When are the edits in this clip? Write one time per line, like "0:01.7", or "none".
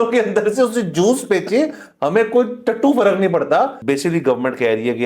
0:03.8